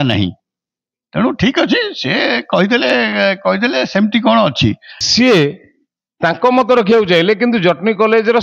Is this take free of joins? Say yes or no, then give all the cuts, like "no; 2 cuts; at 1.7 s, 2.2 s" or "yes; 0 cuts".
no; 1 cut; at 4.9 s